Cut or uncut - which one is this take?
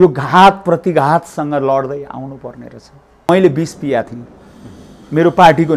cut